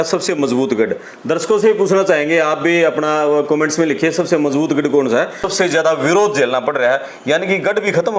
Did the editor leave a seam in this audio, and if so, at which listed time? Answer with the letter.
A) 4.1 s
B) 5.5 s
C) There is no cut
B